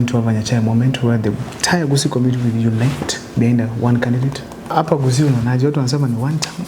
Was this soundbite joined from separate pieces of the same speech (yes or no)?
yes